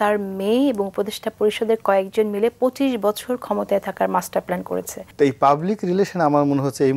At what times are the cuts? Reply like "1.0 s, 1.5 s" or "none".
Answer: 5.0 s